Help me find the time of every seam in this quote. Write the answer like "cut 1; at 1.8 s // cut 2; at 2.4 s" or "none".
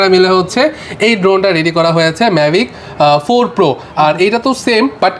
none